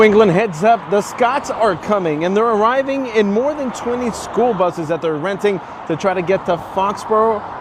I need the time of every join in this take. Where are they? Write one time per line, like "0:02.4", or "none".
none